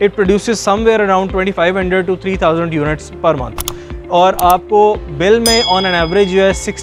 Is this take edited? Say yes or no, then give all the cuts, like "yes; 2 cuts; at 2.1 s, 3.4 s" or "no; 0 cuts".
no; 0 cuts